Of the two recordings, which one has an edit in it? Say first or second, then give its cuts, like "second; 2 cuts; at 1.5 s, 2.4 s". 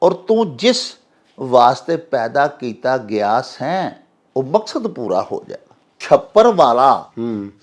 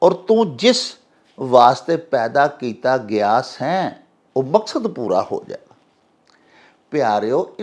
first; 1 cut; at 6.0 s